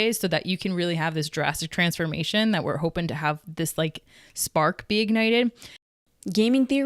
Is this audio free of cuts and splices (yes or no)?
no